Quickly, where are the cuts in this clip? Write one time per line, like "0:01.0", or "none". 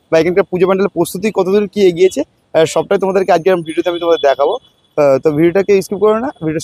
none